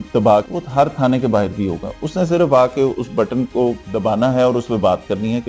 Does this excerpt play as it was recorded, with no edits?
yes; 0 cuts

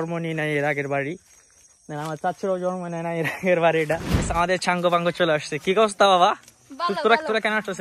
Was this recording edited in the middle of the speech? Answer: yes; 1 cut; at 4.3 s

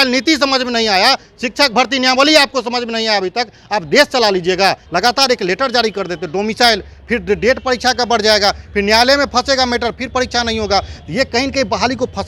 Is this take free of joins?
no; 1 cut; at 4.8 s

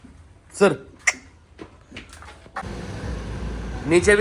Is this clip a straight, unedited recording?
no; 1 cut; at 2.6 s

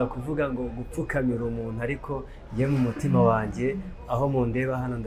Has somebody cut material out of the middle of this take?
no; 0 cuts

